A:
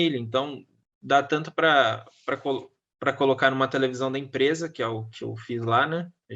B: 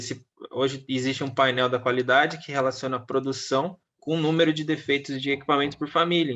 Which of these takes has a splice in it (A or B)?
B